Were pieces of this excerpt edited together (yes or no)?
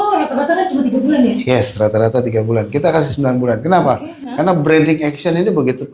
no